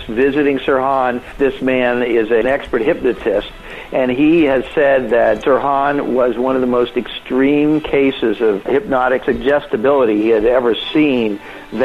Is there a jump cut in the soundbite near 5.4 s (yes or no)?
yes